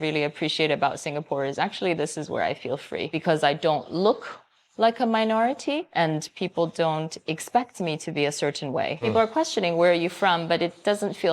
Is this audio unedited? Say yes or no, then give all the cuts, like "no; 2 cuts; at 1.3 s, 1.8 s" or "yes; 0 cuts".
no; 3 cuts; at 3.1 s, 5.9 s, 9.0 s